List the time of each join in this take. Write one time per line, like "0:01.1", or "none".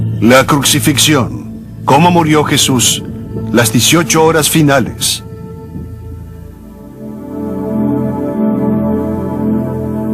0:09.2